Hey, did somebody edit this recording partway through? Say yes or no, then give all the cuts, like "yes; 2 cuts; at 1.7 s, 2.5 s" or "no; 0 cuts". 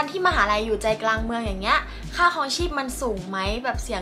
no; 0 cuts